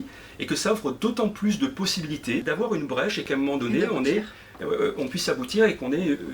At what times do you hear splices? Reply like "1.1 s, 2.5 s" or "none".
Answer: 2.4 s